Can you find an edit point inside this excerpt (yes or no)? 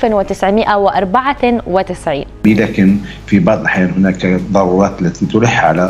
yes